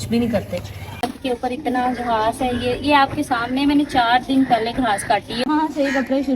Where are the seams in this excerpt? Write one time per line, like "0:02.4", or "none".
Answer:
0:01.1
0:05.3